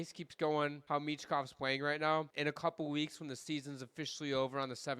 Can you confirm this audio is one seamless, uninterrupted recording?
no; 2 cuts; at 0.8 s, 2.3 s

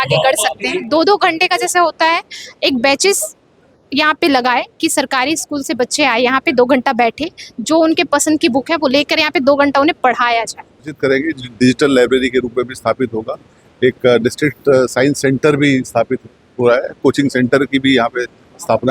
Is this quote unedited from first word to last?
no; 2 cuts; at 0.8 s, 10.9 s

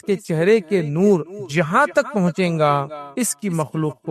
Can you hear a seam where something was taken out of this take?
yes; 2 cuts; at 1.4 s, 3.0 s

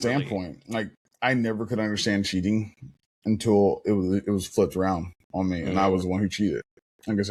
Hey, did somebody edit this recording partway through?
no; 0 cuts

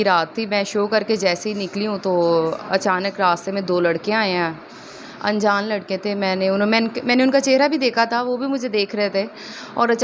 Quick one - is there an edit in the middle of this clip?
no; 0 cuts

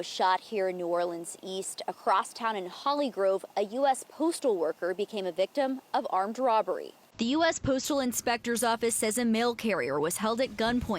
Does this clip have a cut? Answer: no; 0 cuts

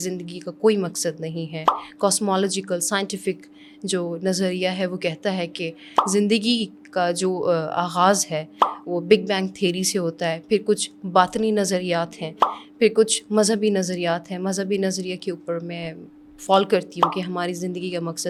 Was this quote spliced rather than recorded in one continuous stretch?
no; 0 cuts

